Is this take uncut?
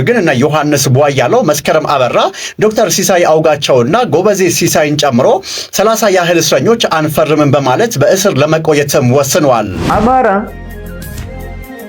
no; 1 cut; at 9.8 s

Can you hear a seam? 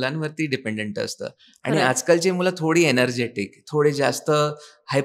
no; 0 cuts

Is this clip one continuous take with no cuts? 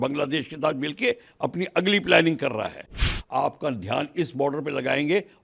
no; 1 cut; at 3.1 s

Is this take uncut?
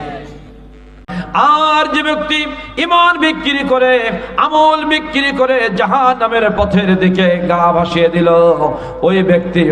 no; 1 cut; at 1.1 s

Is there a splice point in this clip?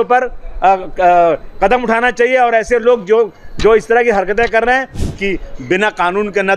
yes; 1 cut; at 5.0 s

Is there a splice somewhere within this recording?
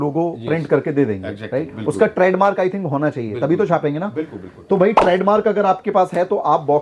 no; 0 cuts

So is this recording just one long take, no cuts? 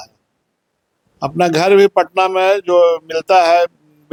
yes; 0 cuts

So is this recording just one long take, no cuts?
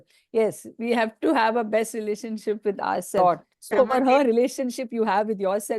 no; 1 cut; at 3.2 s

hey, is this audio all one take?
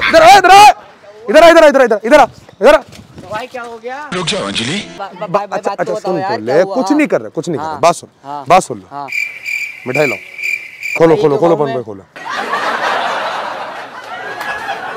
yes; 0 cuts

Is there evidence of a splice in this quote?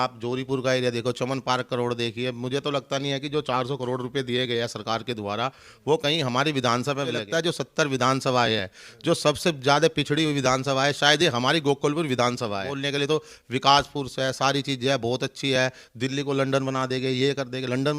yes; 2 cuts; at 7.2 s, 12.7 s

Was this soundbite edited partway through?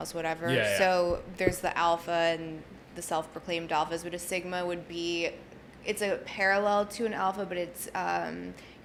no; 0 cuts

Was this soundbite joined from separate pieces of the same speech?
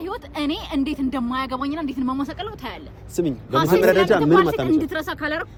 no; 0 cuts

